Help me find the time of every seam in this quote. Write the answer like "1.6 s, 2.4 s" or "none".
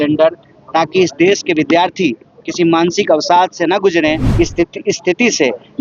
4.2 s

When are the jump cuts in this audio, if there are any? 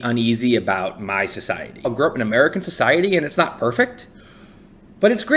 1.9 s

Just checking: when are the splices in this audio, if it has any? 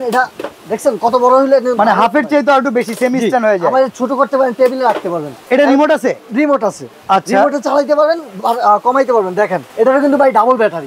5.4 s, 6.9 s, 9.6 s

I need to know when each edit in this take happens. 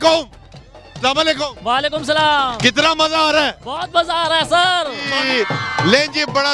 5.0 s

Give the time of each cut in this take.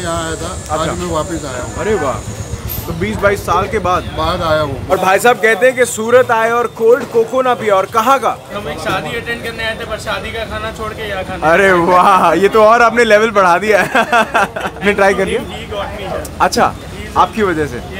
4.8 s, 8.5 s, 14.8 s

